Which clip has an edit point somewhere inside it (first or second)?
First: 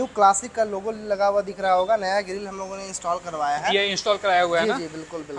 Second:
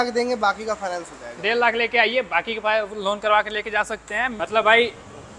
second